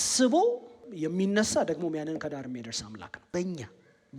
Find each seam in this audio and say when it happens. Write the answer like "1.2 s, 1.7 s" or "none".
0.9 s, 3.1 s